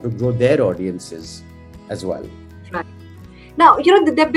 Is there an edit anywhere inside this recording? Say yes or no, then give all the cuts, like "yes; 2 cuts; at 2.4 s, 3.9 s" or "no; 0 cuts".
no; 0 cuts